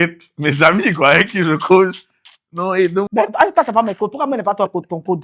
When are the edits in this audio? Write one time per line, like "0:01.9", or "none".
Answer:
0:03.1

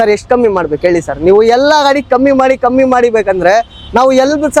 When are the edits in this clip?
none

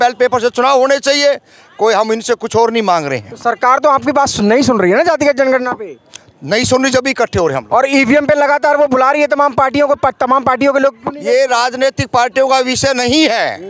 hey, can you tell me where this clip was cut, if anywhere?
none

